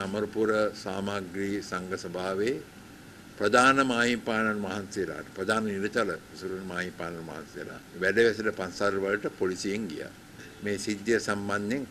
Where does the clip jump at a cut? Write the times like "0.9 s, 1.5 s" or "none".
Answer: 7.8 s, 10.5 s